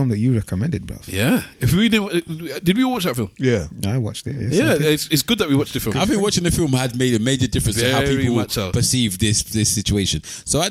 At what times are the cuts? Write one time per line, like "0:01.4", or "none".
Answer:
none